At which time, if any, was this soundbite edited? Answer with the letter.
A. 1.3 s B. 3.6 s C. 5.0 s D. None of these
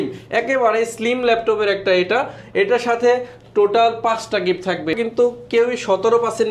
C